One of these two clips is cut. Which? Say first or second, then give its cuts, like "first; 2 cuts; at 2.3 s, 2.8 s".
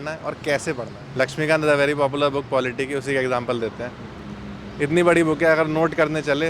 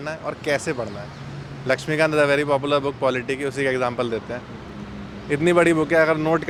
first; 1 cut; at 1.0 s